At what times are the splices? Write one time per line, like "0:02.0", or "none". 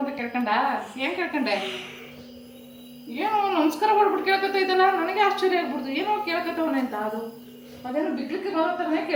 none